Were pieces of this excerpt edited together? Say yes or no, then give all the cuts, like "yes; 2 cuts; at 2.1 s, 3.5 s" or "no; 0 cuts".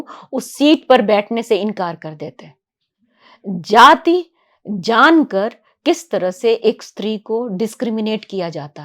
no; 0 cuts